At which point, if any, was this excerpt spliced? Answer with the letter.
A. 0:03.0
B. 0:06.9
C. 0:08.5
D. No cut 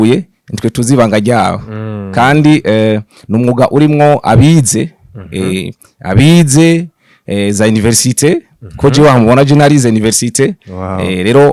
D